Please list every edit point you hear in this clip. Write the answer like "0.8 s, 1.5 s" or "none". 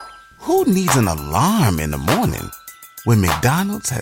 none